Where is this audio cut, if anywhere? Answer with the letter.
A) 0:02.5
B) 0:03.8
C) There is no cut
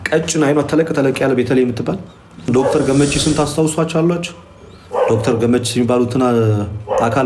A